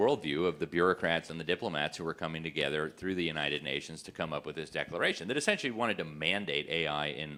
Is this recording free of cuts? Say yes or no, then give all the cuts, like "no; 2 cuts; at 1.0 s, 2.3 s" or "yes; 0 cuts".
yes; 0 cuts